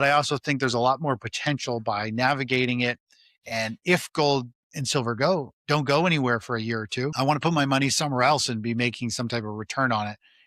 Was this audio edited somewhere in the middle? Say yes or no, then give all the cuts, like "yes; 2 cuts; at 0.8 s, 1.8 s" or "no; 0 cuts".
yes; 1 cut; at 7.1 s